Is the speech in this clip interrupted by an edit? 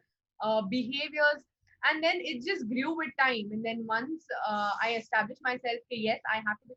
no; 0 cuts

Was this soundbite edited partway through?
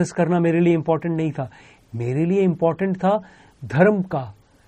no; 0 cuts

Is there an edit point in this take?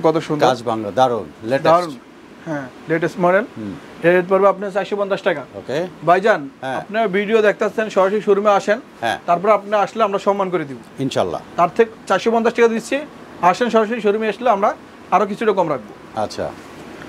no; 0 cuts

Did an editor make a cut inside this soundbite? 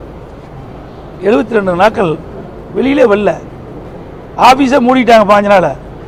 no; 0 cuts

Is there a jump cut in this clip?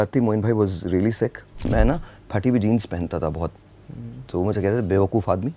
yes; 1 cut; at 1.7 s

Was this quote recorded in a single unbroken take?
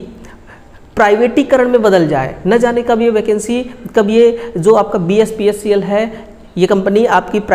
yes; 0 cuts

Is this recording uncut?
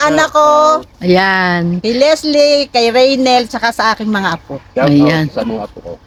yes; 0 cuts

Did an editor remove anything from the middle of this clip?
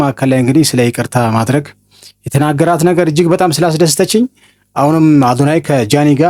no; 0 cuts

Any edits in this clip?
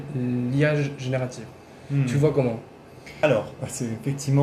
no; 0 cuts

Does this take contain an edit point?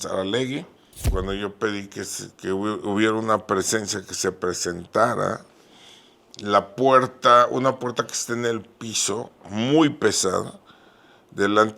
yes; 1 cut; at 1.1 s

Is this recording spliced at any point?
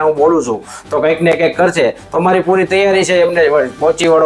no; 0 cuts

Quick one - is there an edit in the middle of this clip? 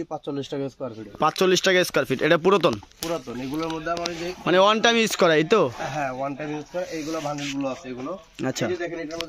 no; 0 cuts

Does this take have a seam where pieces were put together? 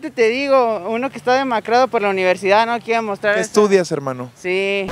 no; 0 cuts

